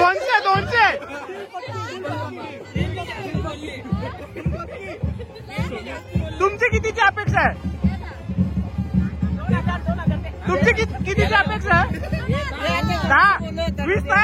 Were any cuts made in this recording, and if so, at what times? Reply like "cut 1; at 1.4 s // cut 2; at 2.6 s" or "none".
none